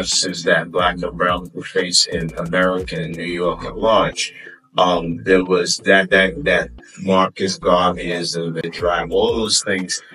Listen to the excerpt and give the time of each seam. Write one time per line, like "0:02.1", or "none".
0:08.6